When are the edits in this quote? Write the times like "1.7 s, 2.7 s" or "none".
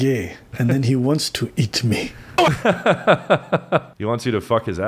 none